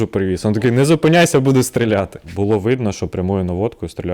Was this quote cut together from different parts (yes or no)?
yes